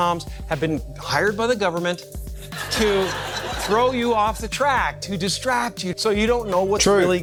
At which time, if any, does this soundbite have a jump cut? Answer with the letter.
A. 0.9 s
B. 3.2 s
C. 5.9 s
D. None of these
D